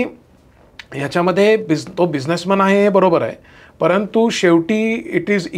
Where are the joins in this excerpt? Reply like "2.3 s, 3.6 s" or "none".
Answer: none